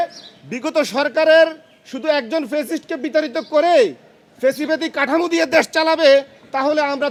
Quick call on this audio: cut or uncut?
uncut